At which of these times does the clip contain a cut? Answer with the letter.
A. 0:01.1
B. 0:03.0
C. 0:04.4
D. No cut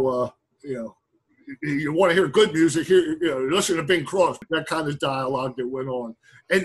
C